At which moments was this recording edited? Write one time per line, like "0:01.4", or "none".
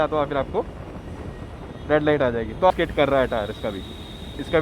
0:02.7